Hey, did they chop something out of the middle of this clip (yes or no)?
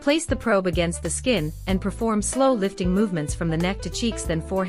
yes